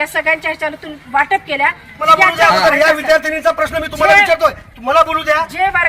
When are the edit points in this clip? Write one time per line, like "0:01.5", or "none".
0:02.0